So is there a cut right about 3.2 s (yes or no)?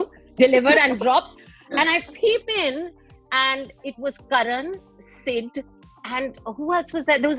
no